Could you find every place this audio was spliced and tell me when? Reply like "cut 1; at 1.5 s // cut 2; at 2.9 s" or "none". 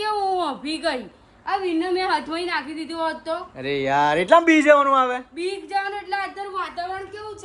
cut 1; at 3.5 s

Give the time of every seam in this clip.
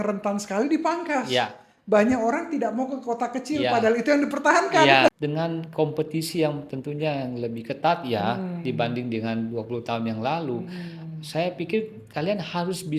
cut 1; at 5.1 s

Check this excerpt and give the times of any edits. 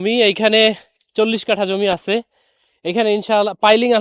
none

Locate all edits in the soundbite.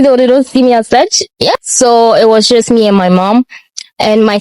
cut 1; at 1.5 s

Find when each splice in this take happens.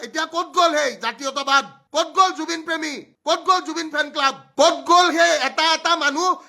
none

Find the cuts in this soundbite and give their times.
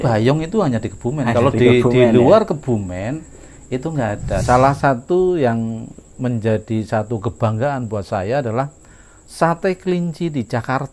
cut 1; at 4.4 s

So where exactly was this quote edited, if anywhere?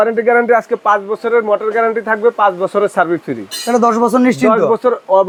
none

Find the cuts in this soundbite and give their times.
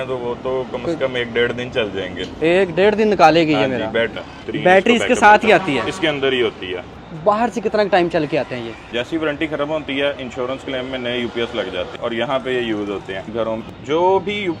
cut 1; at 4.4 s // cut 2; at 7.0 s // cut 3; at 8.9 s // cut 4; at 12.0 s // cut 5; at 13.4 s

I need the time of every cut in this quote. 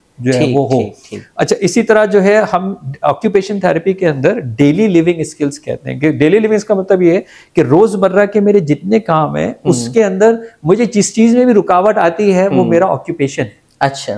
none

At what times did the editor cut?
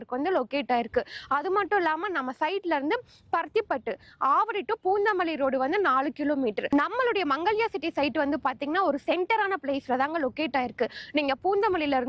none

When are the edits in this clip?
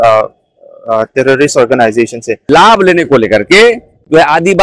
cut 1; at 2.4 s

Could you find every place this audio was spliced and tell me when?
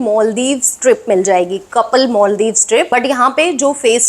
cut 1; at 2.9 s

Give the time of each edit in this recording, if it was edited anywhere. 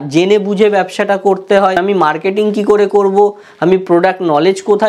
cut 1; at 1.8 s

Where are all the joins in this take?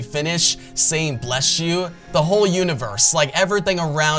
cut 1; at 2.0 s

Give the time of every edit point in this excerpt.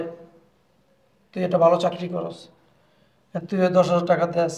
none

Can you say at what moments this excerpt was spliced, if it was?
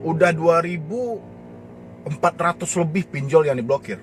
none

